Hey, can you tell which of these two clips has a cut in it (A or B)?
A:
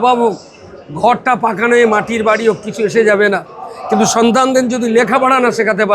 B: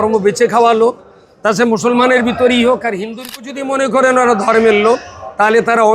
B